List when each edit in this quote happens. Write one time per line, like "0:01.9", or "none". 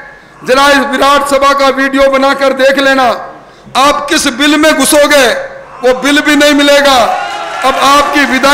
none

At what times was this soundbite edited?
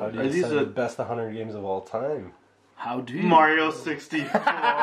none

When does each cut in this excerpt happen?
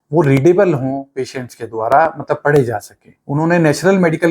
0:03.2

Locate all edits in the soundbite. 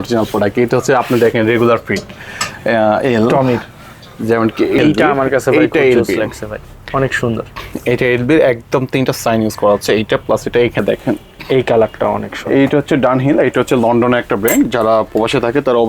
0:04.8
0:10.8

